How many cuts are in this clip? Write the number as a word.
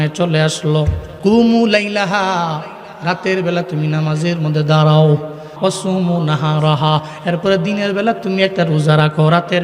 two